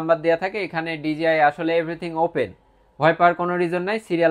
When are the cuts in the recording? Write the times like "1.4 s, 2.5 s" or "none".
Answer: none